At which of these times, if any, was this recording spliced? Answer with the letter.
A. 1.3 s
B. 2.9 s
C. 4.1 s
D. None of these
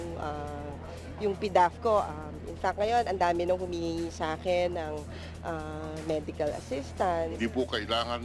D